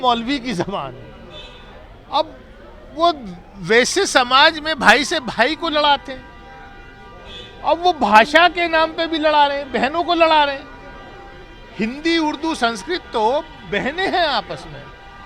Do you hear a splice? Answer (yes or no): no